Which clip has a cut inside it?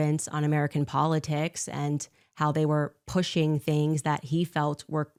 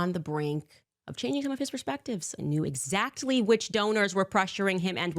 second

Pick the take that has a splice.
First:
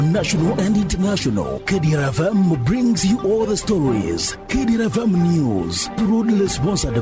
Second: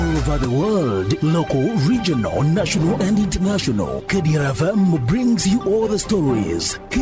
first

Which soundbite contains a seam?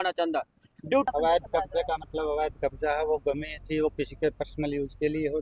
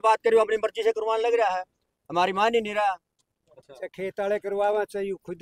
first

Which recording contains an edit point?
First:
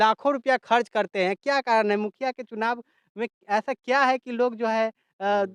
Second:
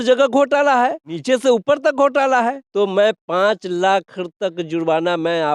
second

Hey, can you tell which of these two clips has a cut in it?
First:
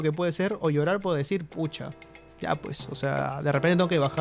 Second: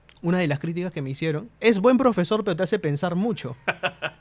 second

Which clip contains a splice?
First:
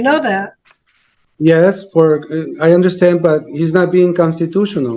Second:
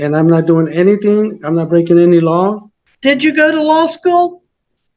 second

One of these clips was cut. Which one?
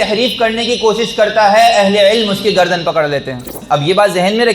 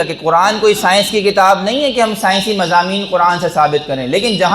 first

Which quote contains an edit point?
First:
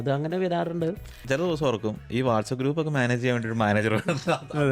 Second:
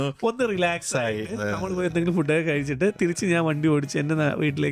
first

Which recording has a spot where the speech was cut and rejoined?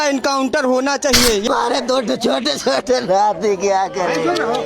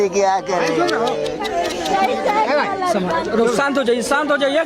first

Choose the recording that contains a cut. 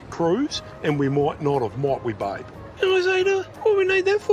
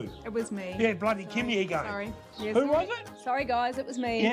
first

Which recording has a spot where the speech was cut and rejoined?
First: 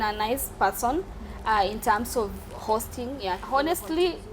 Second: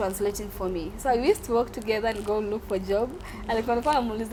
first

